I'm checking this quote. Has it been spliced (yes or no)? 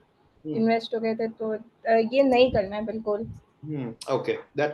no